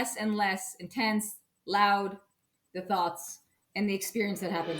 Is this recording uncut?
yes; 0 cuts

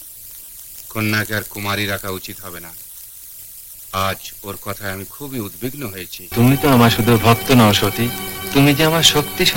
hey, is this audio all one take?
no; 1 cut; at 6.1 s

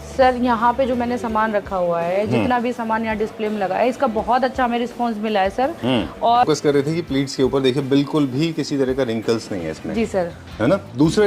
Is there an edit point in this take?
yes; 1 cut; at 6.4 s

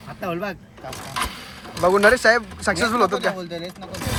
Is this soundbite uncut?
yes; 0 cuts

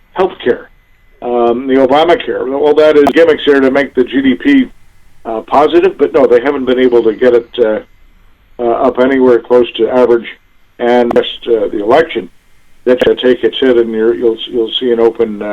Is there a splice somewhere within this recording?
yes; 3 cuts; at 3.1 s, 11.2 s, 13.1 s

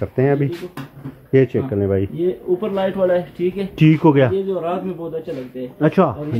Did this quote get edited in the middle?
no; 0 cuts

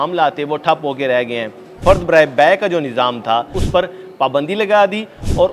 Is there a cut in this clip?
yes; 2 cuts; at 1.7 s, 3.6 s

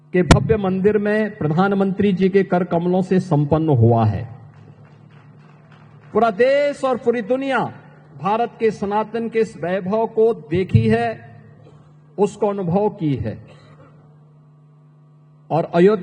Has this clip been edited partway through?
no; 0 cuts

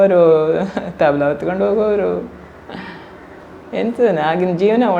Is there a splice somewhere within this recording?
no; 0 cuts

